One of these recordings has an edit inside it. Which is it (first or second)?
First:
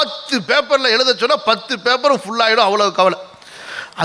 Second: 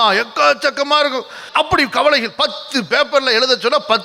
second